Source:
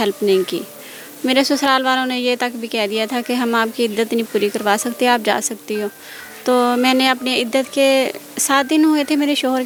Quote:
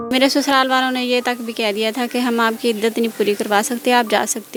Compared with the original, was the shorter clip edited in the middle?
no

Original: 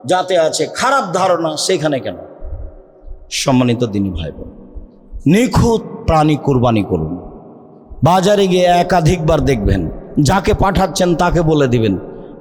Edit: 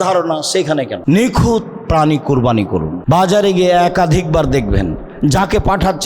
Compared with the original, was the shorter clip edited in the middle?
yes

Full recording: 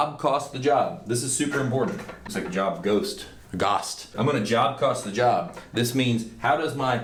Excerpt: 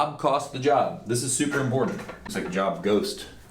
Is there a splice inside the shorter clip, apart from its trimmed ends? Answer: no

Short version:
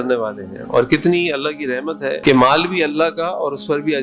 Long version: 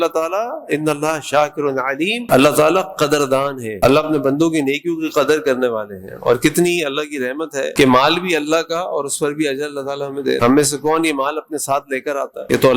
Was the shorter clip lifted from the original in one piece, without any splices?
yes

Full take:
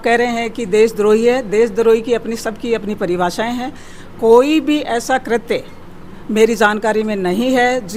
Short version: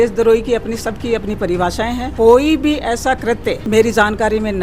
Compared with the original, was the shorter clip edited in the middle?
yes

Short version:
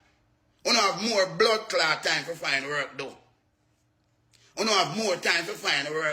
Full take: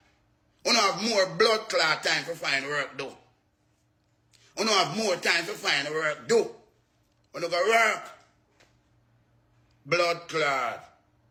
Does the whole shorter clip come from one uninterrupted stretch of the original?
yes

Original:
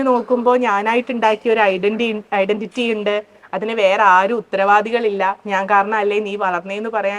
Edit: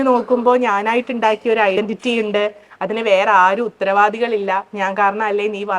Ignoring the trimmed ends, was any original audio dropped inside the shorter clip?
yes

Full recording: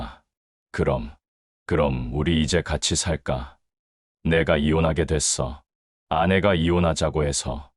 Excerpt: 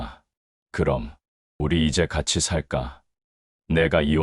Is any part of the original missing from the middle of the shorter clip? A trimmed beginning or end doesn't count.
yes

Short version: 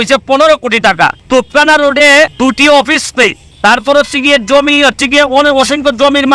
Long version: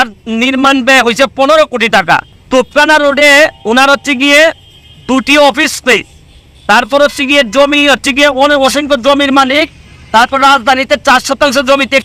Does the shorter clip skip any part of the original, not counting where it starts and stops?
yes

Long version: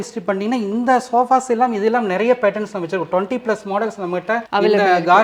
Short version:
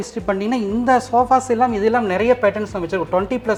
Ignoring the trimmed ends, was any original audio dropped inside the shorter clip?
no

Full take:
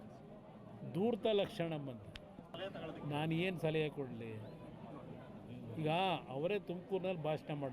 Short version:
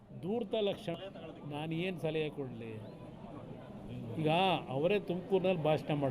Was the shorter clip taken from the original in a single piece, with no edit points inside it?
no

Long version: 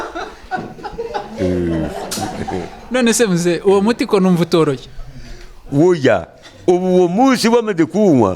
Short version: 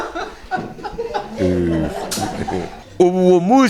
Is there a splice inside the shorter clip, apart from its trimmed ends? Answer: yes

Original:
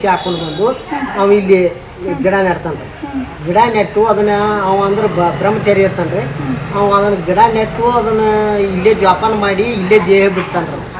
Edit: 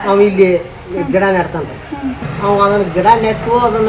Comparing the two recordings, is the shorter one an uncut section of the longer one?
no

